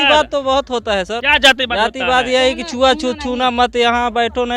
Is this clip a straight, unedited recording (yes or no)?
no